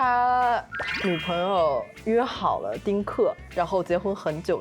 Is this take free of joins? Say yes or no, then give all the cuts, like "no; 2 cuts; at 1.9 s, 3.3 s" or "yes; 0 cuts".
yes; 0 cuts